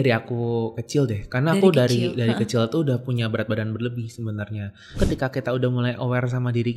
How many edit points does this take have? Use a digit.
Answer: 1